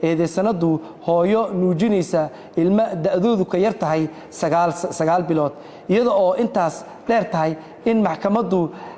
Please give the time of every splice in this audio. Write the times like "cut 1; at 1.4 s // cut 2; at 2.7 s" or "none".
none